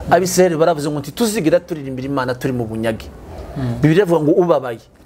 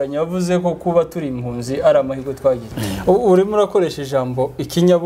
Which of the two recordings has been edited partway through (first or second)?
second